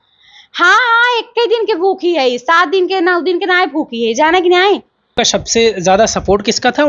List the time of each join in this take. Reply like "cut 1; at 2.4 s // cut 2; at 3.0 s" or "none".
cut 1; at 5.2 s